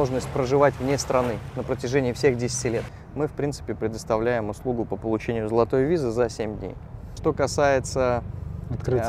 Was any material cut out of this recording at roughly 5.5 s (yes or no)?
no